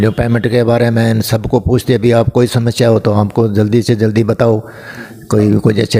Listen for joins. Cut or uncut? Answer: uncut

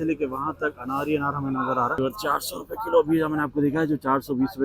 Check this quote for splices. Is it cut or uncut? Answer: cut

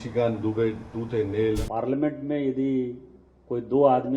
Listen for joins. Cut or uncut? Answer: cut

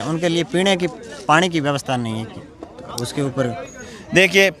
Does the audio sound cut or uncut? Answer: uncut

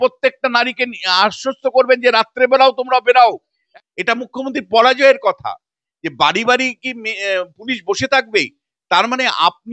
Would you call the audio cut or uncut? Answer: cut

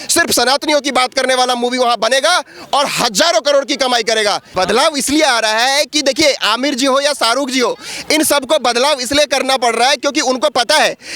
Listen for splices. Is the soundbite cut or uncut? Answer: cut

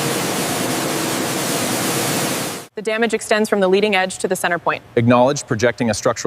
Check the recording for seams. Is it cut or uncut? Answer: cut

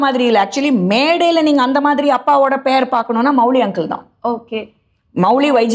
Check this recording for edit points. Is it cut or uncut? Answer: uncut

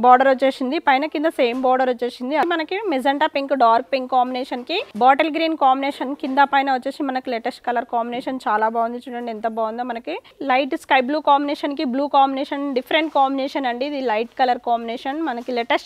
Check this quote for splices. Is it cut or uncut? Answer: cut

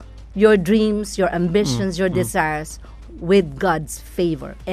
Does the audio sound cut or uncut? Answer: uncut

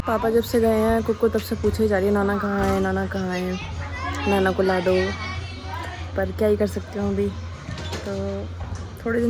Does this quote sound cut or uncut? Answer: uncut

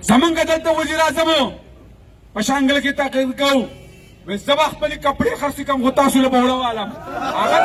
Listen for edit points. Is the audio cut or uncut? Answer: uncut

